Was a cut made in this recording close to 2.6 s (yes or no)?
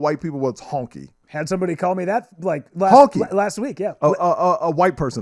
no